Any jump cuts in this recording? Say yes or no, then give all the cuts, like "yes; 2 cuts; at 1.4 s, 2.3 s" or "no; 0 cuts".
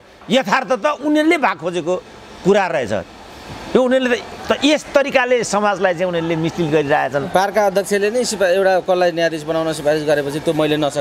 no; 0 cuts